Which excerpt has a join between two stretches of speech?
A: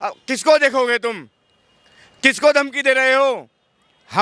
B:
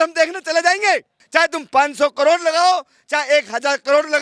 B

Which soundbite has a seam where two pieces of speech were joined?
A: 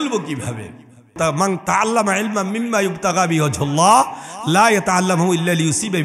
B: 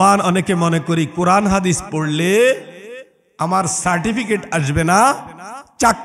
A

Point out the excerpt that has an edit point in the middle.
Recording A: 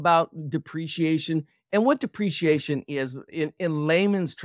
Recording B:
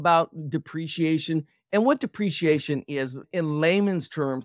B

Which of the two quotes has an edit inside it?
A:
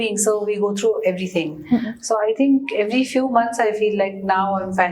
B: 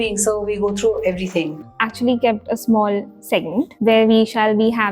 B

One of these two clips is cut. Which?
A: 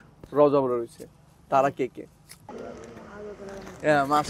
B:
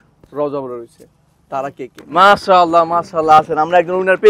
B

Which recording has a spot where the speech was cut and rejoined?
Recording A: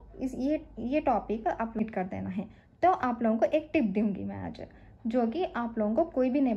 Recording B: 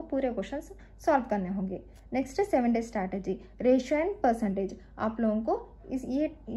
A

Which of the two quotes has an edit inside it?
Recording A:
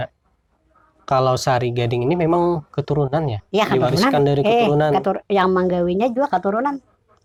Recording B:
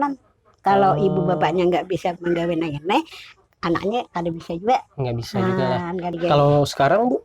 B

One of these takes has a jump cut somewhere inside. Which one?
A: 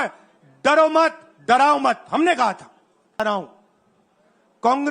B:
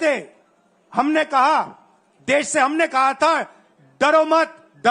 A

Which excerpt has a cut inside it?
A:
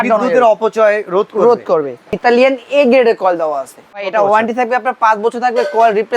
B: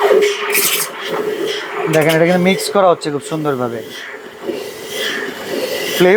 A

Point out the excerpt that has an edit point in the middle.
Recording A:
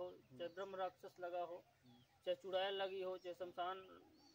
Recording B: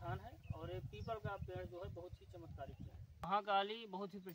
B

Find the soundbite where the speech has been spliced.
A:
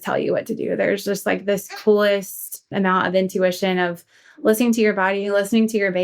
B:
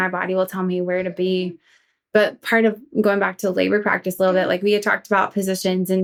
A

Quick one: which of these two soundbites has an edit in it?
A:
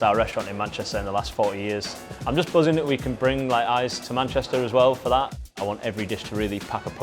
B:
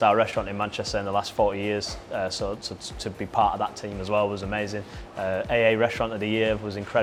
A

